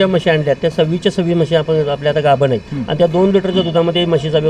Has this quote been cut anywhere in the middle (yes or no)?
yes